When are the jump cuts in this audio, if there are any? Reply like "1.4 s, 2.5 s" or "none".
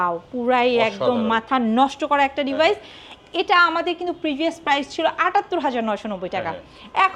none

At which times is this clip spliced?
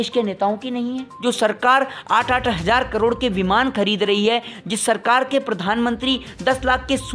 1.1 s

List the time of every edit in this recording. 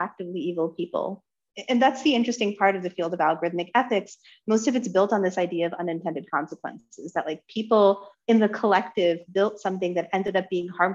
1.4 s

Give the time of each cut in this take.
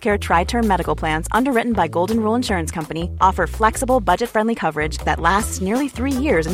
none

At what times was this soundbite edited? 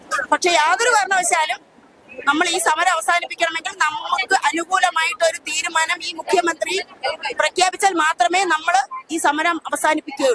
none

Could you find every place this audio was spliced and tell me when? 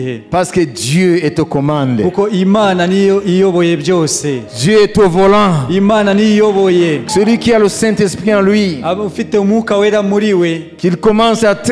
7.1 s

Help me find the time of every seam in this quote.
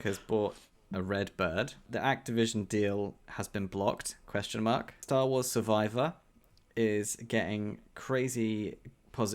1.8 s, 4.9 s

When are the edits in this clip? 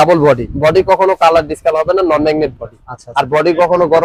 none

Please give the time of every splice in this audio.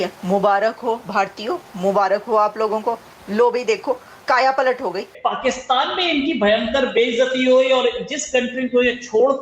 5.1 s

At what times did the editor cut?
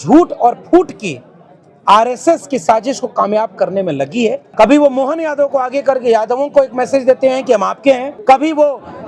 4.4 s, 8.1 s

